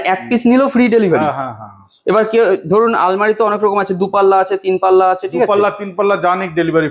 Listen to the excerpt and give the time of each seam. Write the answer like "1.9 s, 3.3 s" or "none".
none